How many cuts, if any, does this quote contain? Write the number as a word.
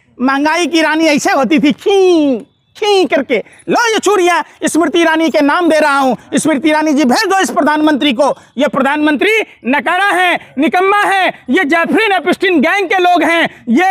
zero